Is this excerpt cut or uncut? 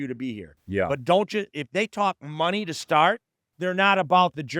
cut